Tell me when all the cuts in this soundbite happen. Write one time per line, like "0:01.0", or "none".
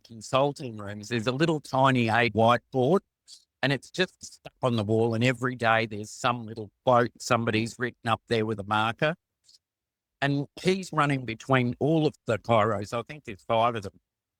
none